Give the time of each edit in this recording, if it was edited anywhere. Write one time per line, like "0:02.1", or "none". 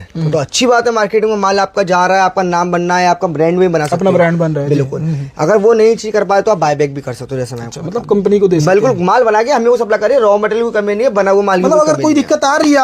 none